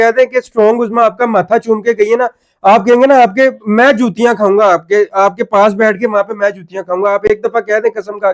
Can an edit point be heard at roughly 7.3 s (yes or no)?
no